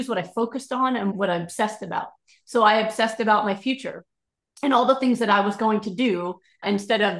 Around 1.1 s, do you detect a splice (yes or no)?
yes